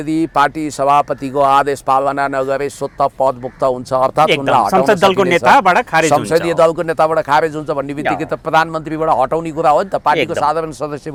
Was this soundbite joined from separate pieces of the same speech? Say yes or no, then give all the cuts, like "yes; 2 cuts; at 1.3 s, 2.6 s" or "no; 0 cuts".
no; 0 cuts